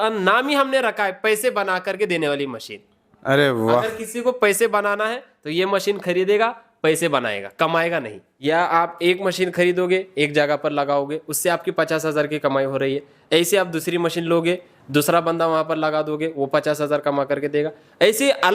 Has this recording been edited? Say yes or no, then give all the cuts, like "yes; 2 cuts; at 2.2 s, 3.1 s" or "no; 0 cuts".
yes; 1 cut; at 8.2 s